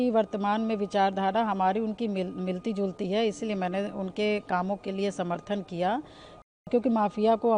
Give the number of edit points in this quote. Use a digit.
1